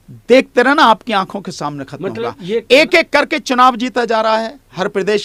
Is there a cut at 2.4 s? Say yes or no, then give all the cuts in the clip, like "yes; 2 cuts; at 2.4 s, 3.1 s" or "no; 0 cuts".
no; 0 cuts